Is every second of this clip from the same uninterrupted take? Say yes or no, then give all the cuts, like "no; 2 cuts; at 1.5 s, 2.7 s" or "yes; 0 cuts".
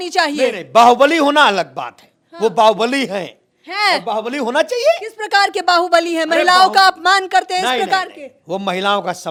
yes; 0 cuts